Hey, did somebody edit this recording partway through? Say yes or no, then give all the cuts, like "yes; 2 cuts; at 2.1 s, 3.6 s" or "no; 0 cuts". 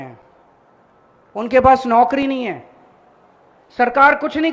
no; 0 cuts